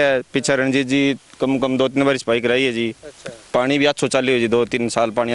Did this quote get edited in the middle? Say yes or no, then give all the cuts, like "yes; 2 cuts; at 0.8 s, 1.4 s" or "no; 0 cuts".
no; 0 cuts